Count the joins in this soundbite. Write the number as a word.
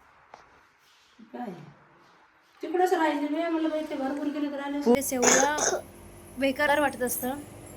one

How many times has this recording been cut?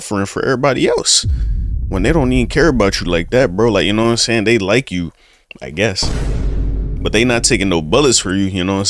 zero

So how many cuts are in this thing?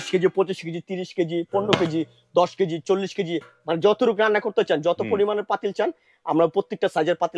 zero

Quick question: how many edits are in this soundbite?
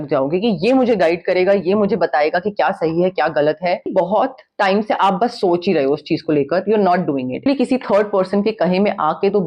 two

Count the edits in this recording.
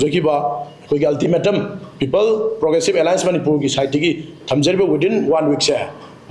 zero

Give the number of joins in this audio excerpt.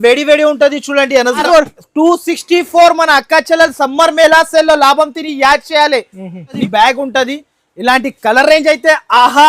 two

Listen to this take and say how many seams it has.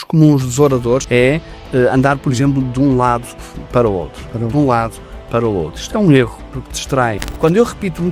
two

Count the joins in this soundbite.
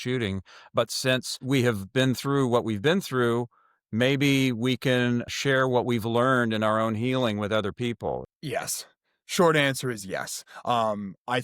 three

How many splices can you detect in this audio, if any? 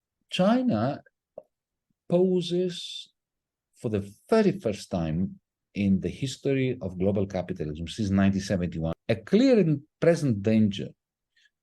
one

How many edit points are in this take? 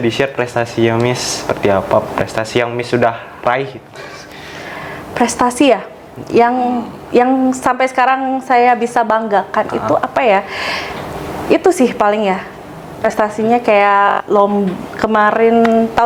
zero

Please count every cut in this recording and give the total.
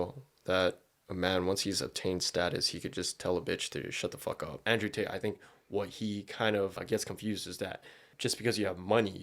three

